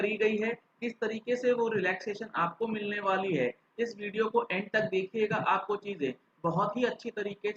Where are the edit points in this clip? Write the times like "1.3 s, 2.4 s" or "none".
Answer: none